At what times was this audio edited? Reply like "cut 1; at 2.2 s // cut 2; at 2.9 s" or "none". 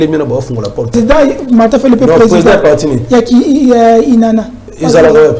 cut 1; at 0.9 s